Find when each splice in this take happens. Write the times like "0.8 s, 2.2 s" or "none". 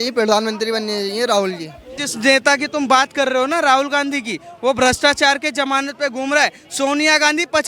2.0 s